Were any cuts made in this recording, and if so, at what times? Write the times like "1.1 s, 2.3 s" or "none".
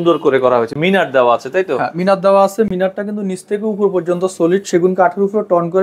none